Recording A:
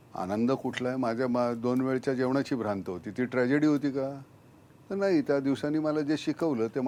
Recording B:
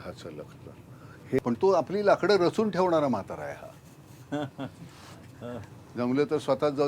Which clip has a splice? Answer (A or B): B